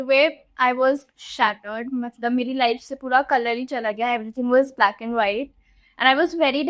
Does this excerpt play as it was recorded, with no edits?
yes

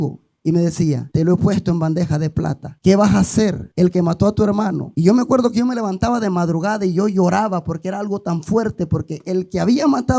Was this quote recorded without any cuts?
no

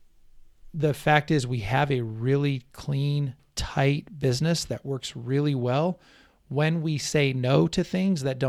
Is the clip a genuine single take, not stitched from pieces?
yes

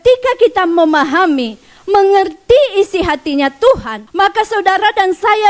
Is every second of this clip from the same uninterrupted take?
no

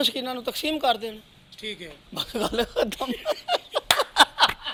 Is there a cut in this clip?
no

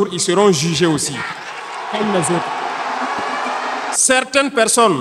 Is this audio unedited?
no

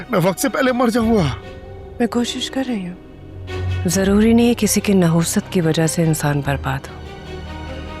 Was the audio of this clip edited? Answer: yes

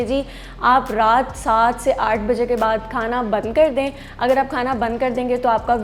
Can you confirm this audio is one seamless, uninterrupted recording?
yes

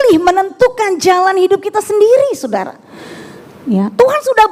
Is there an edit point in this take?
no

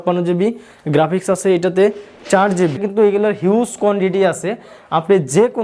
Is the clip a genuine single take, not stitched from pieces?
no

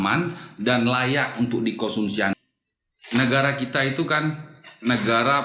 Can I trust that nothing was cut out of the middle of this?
no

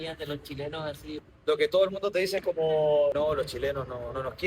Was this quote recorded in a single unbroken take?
no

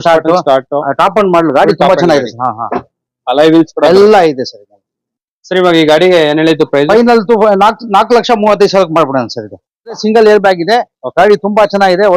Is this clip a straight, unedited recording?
no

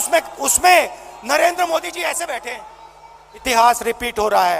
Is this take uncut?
no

